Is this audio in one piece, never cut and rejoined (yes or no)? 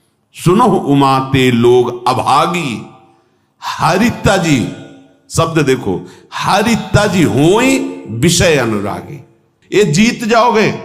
no